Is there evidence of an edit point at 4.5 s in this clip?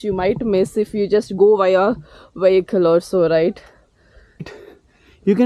yes; 1 cut; at 4.5 s

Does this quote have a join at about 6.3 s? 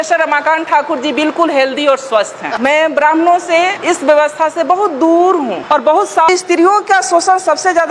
yes; 1 cut; at 6.3 s

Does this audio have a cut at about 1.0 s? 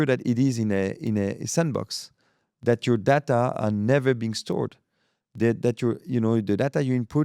no; 0 cuts

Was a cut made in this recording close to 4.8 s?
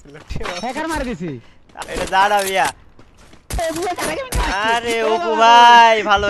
no; 2 cuts; at 1.7 s, 3.6 s

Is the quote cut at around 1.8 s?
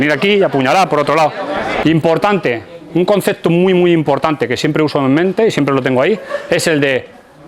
yes; 1 cut; at 1.8 s

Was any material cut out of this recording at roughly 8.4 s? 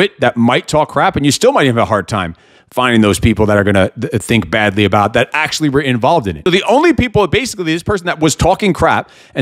no; 1 cut; at 6.3 s

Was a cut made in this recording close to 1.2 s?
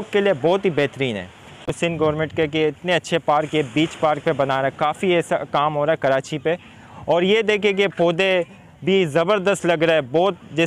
no; 0 cuts

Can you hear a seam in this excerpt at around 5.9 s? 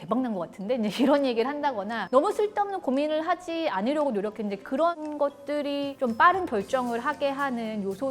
yes; 1 cut; at 5.9 s

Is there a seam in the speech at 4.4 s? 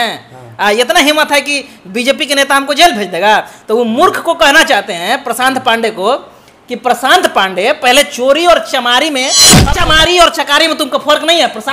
no; 1 cut; at 9.6 s

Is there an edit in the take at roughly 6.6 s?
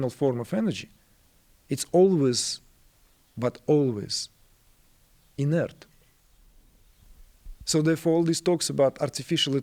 yes; 1 cut; at 6.6 s

